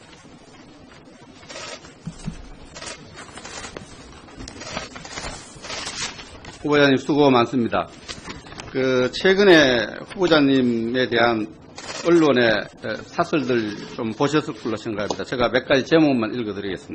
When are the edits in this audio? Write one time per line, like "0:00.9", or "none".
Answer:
0:11.1